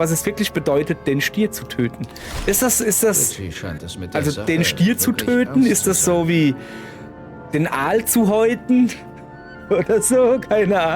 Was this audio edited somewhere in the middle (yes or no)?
yes